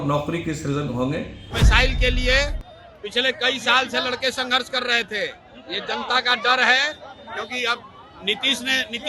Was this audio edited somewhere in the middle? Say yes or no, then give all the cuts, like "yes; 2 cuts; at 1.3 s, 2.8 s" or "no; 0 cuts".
yes; 1 cut; at 1.6 s